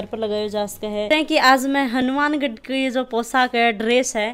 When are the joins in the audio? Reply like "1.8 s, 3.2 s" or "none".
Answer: 1.1 s

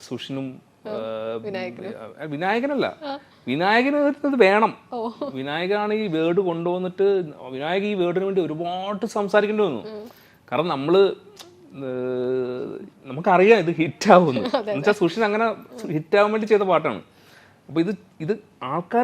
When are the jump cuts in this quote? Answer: none

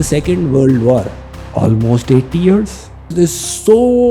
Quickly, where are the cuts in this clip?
1.2 s, 3.1 s

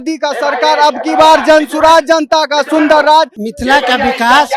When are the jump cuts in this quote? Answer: 3.4 s

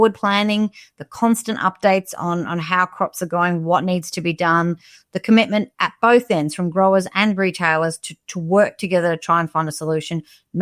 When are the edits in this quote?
none

